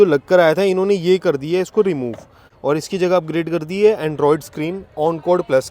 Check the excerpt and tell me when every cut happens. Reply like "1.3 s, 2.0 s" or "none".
2.5 s